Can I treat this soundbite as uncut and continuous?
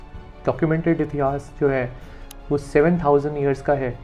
yes; 0 cuts

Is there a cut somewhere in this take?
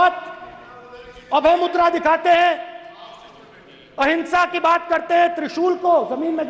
no; 0 cuts

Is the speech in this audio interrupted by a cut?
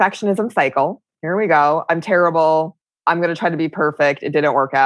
yes; 1 cut; at 2.8 s

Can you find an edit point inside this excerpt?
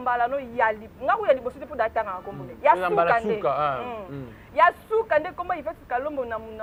no; 0 cuts

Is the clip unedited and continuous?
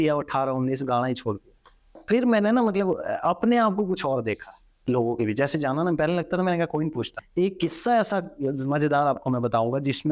no; 2 cuts; at 2.0 s, 7.2 s

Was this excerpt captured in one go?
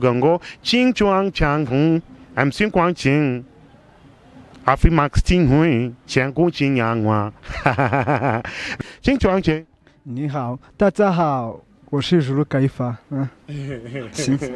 no; 1 cut; at 8.8 s

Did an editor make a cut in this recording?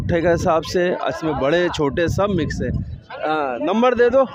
no; 0 cuts

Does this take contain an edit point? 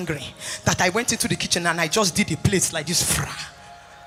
no; 0 cuts

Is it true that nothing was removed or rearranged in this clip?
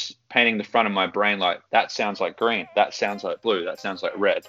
yes; 0 cuts

